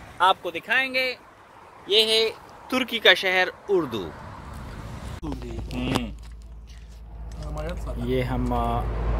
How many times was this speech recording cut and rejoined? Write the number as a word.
one